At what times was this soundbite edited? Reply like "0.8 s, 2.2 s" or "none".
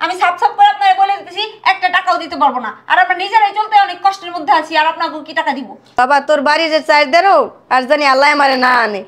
6.0 s